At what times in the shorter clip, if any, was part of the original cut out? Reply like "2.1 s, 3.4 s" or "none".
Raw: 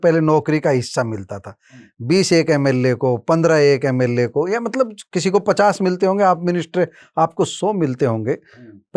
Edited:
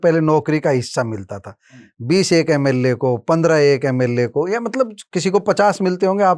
none